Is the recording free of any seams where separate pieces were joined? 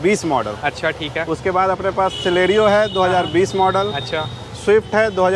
yes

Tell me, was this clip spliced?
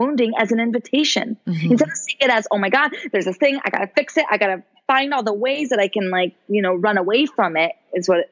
no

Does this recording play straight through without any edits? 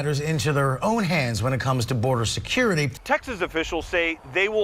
no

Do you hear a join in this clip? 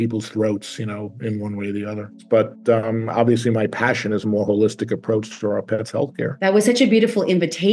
yes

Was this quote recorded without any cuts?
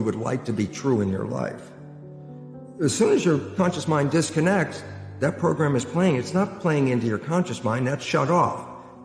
yes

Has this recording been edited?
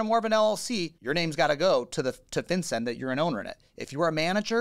yes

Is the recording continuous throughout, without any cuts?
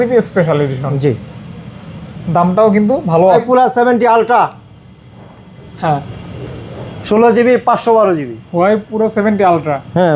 no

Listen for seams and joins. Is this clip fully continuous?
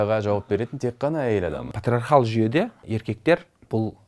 no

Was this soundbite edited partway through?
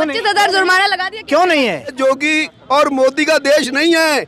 yes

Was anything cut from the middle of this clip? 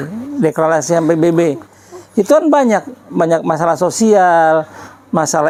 no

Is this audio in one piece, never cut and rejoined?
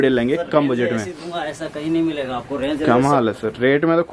yes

